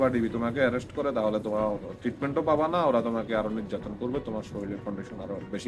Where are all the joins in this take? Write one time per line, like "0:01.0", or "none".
none